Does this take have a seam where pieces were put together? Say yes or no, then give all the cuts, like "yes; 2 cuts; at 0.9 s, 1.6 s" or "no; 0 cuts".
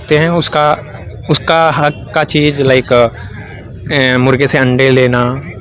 no; 0 cuts